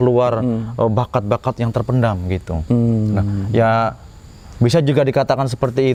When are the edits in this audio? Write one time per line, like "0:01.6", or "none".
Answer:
none

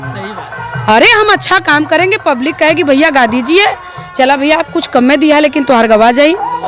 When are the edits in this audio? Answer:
none

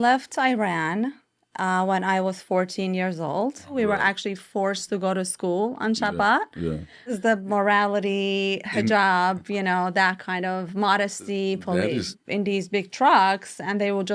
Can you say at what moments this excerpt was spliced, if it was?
0:03.8
0:07.1
0:12.2

